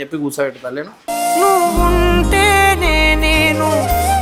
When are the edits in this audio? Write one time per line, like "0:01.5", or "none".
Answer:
none

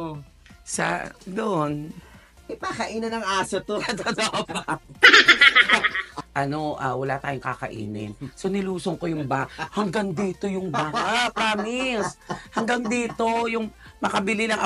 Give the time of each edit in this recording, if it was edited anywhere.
0:06.1

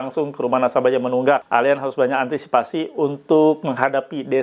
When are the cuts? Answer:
0:01.4

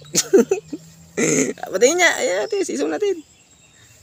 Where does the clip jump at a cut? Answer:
none

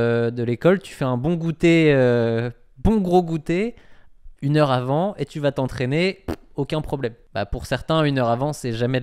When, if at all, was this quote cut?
0:07.2

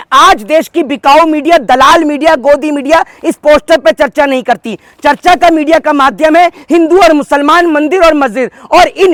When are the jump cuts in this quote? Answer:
none

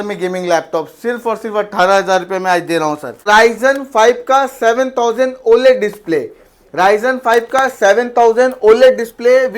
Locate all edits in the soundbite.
0:03.2

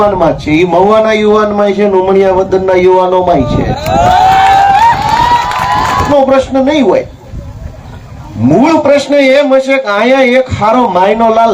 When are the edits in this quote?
0:06.1

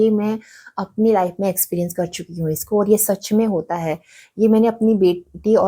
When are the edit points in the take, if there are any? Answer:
none

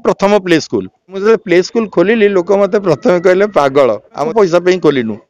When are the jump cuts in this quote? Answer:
0:01.2
0:04.3

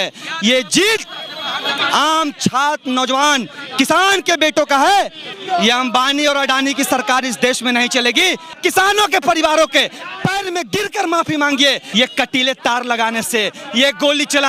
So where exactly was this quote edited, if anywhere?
0:05.4
0:08.6
0:11.8

